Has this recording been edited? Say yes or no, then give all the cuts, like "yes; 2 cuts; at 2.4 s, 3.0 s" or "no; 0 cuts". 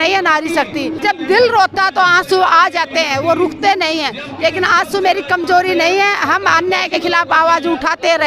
yes; 1 cut; at 1.0 s